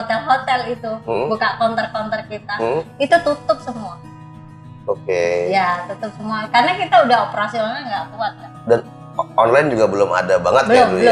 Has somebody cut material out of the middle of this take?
no; 0 cuts

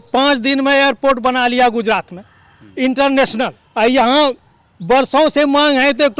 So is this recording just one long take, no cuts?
no; 1 cut; at 3.6 s

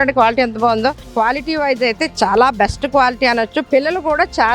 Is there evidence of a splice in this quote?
yes; 2 cuts; at 1.0 s, 3.6 s

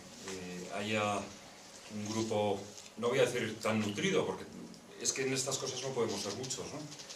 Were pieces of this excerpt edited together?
no; 0 cuts

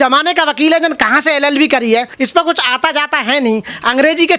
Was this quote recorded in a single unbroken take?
no; 1 cut; at 2.1 s

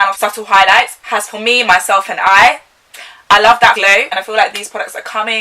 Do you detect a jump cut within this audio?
yes; 1 cut; at 4.1 s

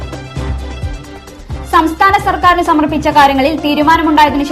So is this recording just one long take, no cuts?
no; 1 cut; at 0.9 s

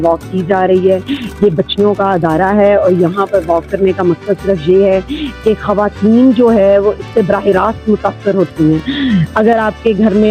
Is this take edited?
no; 0 cuts

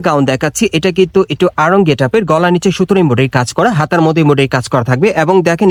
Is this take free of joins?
yes; 0 cuts

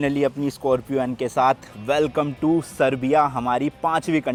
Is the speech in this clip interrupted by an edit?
no; 0 cuts

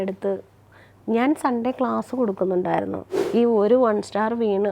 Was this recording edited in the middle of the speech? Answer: yes; 1 cut; at 3.1 s

